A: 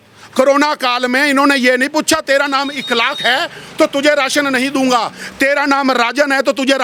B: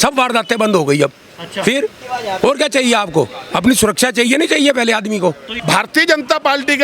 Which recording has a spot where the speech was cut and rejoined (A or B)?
B